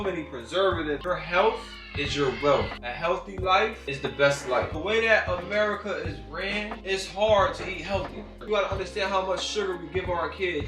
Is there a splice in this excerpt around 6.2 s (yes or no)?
no